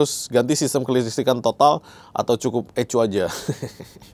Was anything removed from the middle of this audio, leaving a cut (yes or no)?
no